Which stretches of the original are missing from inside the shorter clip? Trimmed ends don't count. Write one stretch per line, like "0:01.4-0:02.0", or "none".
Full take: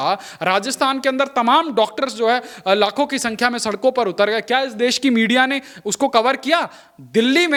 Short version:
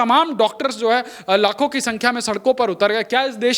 none